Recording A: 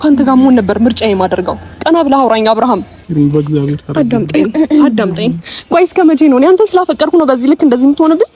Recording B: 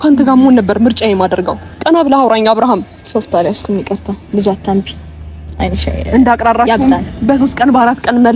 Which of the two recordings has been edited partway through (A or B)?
A